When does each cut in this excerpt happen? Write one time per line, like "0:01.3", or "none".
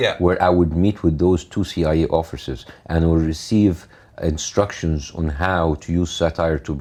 none